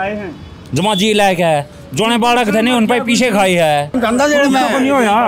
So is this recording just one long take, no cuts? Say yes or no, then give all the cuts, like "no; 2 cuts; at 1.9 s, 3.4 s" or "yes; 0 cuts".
no; 1 cut; at 3.9 s